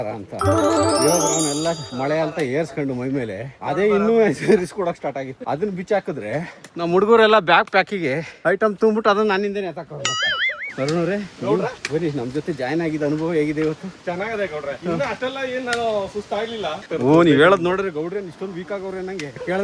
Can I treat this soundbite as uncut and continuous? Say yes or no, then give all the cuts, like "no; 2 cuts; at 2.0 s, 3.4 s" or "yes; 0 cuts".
no; 3 cuts; at 5.3 s, 10.6 s, 16.8 s